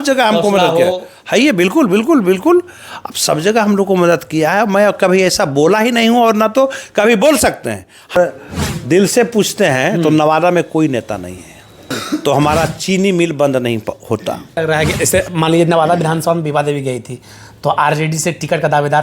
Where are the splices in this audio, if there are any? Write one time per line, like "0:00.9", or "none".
0:08.1
0:12.0
0:14.6